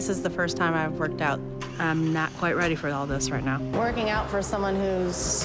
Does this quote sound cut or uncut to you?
uncut